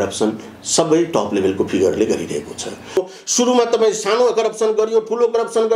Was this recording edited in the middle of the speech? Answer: yes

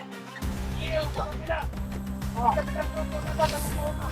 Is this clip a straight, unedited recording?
yes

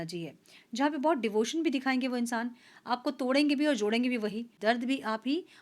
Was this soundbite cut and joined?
yes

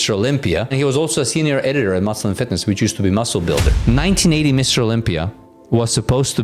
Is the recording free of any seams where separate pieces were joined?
no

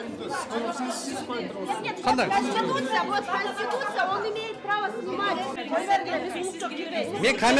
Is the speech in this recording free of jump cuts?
yes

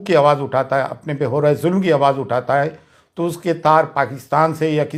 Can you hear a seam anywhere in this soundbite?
no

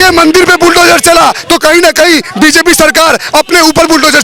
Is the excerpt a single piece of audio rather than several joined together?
yes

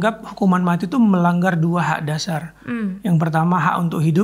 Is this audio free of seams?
yes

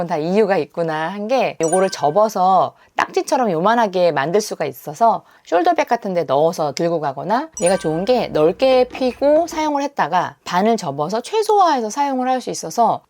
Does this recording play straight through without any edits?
no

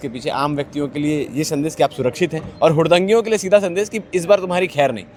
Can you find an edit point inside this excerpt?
no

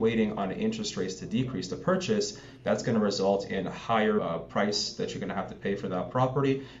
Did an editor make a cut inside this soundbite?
no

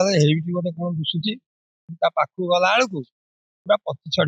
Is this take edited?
no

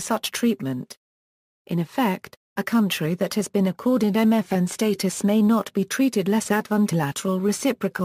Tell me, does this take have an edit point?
no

